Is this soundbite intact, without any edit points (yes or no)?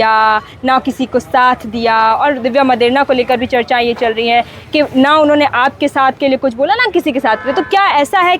yes